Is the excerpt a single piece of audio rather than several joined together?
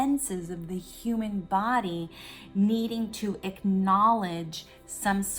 yes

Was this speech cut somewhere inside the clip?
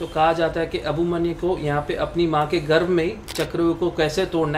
no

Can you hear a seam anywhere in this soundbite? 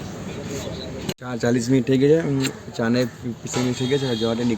yes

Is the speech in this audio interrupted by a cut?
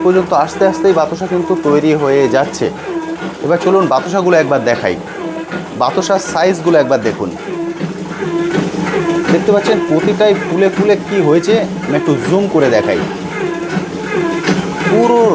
no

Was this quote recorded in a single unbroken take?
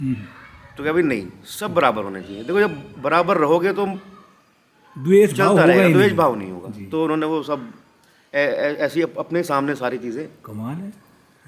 yes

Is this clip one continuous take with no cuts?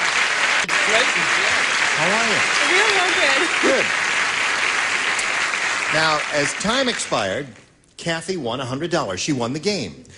no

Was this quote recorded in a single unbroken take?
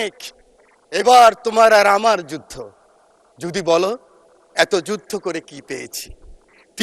yes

